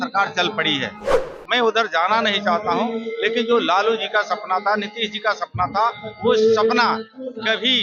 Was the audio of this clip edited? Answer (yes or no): no